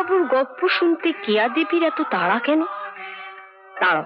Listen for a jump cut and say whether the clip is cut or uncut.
uncut